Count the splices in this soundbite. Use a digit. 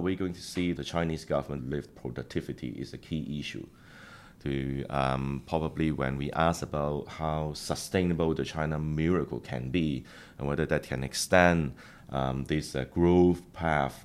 2